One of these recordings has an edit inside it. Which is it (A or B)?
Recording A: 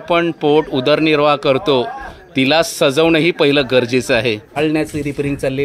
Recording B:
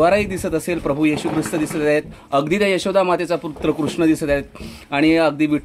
A